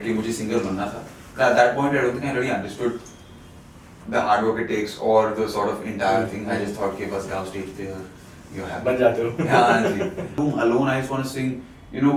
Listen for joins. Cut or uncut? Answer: cut